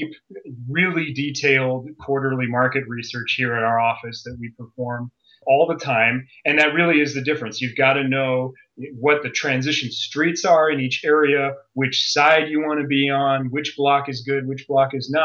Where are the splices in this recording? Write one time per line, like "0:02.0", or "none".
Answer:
0:05.4